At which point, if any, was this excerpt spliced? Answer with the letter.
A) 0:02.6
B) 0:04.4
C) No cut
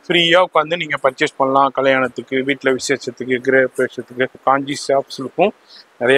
B